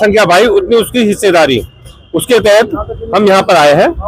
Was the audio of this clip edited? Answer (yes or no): no